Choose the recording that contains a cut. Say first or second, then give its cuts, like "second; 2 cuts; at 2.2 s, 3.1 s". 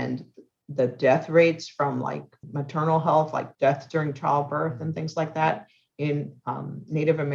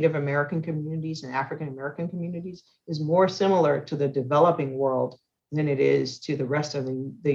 first; 2 cuts; at 2.4 s, 3.5 s